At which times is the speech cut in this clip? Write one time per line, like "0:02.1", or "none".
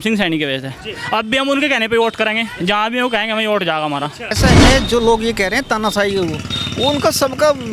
0:04.4